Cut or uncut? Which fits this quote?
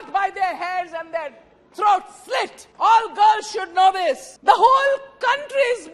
cut